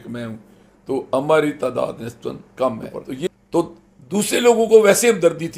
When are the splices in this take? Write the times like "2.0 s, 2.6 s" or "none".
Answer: 3.3 s